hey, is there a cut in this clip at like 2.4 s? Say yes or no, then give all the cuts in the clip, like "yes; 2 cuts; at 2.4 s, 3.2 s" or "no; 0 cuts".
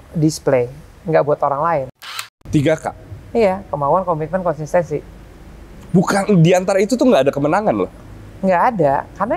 yes; 1 cut; at 2.4 s